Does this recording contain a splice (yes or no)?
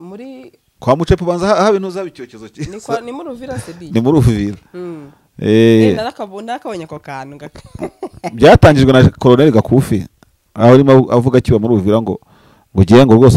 no